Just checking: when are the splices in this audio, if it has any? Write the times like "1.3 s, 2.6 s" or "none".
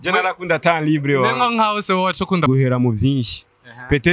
2.5 s